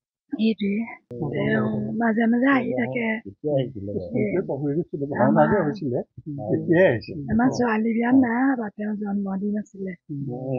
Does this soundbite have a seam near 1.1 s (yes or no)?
yes